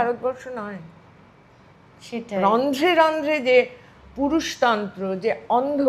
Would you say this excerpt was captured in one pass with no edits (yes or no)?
yes